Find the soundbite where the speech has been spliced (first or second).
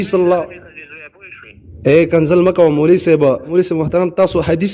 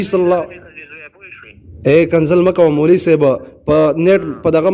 first